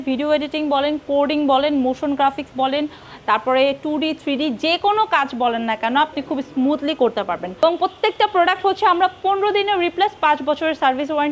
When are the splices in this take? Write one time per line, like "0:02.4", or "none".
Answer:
0:07.6